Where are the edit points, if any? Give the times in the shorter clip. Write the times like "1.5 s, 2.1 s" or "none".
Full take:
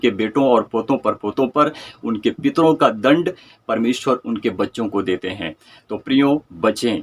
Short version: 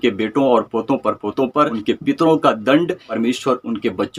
1.8 s, 3.1 s